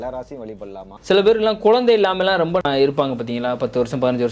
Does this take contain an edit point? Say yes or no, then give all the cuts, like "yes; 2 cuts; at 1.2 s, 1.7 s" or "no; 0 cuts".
yes; 2 cuts; at 1.0 s, 2.6 s